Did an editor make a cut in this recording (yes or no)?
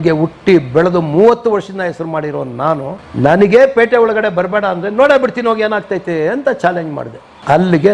no